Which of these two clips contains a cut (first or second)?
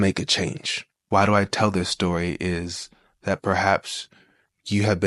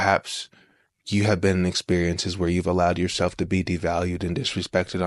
first